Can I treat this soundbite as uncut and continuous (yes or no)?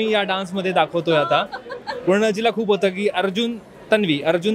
yes